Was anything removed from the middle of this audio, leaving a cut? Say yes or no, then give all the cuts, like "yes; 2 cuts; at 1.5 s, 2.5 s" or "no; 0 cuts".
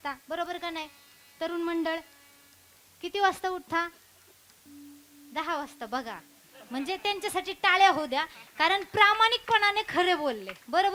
yes; 1 cut; at 4.6 s